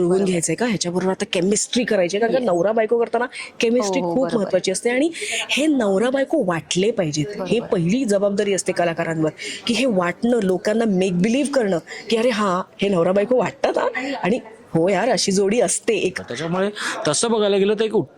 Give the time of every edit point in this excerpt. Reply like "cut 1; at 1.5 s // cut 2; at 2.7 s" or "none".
cut 1; at 16.3 s